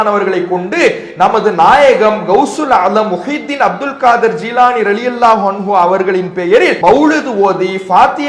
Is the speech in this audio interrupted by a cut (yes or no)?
yes